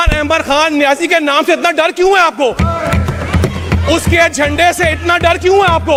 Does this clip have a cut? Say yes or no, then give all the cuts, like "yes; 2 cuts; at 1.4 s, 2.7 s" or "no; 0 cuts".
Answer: no; 0 cuts